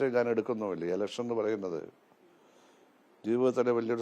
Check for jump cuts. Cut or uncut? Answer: uncut